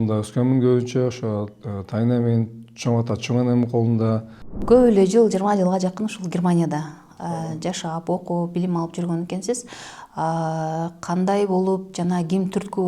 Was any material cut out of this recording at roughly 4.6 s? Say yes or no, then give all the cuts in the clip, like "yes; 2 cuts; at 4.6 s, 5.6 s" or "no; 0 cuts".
yes; 1 cut; at 4.6 s